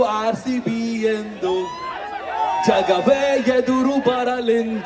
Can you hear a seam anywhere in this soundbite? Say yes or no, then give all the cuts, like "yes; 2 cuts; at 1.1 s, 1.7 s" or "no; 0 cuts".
no; 0 cuts